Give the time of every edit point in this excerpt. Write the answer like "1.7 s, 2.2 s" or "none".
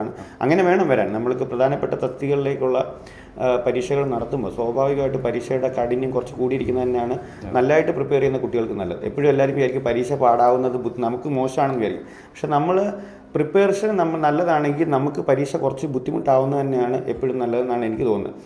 none